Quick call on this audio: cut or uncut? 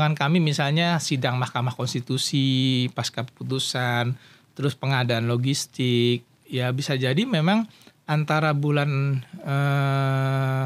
uncut